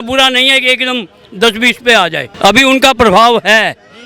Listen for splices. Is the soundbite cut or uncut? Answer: cut